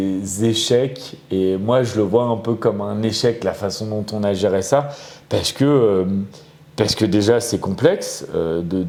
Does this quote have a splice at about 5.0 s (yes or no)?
no